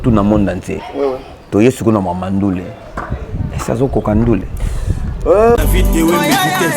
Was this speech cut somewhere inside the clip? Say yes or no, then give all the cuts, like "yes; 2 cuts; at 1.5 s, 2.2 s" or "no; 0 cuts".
yes; 1 cut; at 5.6 s